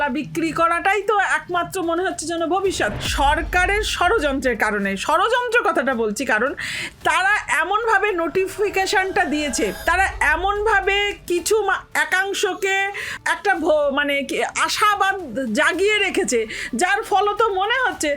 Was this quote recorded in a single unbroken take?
no; 3 cuts; at 3.0 s, 9.8 s, 13.1 s

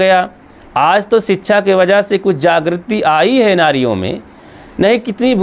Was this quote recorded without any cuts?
yes; 0 cuts

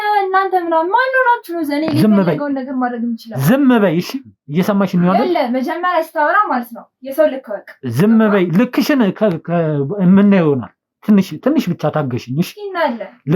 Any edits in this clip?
no; 0 cuts

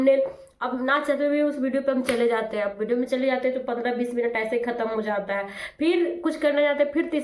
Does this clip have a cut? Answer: no; 0 cuts

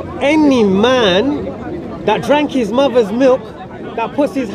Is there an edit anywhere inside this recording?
no; 0 cuts

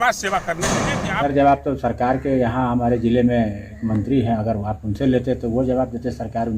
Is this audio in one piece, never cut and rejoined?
no; 1 cut; at 1.2 s

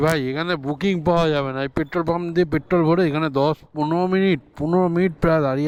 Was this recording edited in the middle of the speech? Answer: no; 0 cuts

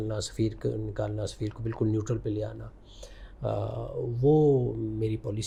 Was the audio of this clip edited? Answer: no; 0 cuts

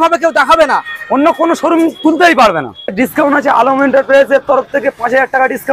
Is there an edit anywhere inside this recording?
yes; 1 cut; at 2.9 s

